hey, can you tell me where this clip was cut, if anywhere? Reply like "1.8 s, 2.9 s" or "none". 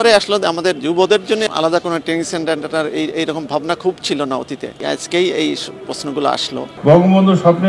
1.5 s, 6.7 s

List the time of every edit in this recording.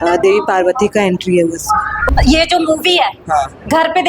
2.0 s

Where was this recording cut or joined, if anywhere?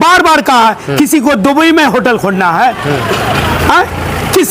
none

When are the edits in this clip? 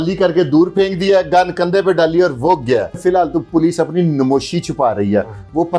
3.0 s

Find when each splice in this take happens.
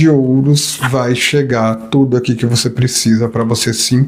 none

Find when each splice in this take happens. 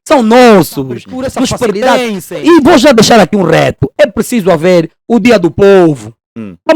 2.2 s

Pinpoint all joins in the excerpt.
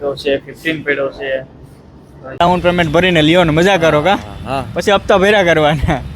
2.4 s

